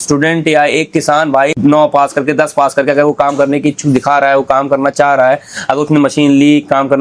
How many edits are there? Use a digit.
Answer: 1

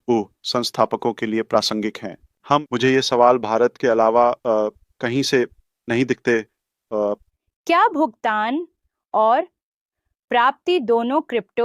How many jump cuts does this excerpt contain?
2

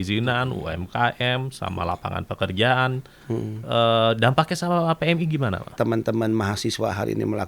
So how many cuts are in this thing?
1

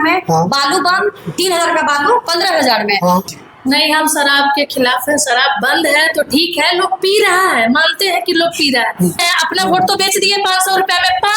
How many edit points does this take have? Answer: 2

